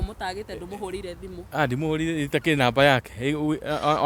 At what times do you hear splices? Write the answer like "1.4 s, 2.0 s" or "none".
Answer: none